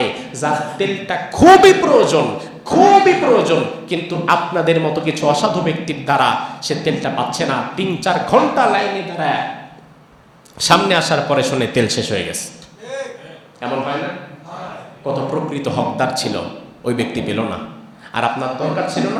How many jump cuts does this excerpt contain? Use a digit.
0